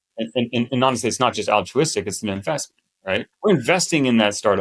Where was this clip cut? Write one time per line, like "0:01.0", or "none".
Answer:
0:03.3